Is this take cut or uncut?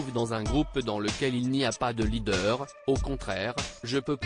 uncut